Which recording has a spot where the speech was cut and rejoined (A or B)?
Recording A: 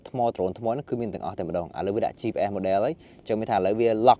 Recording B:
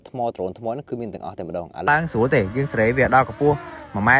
B